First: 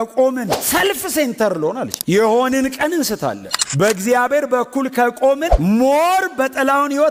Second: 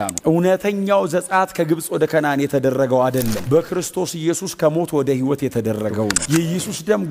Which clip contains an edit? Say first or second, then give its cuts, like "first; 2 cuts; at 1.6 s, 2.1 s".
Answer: second; 1 cut; at 6.2 s